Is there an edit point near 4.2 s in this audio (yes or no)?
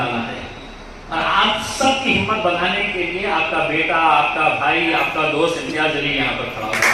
no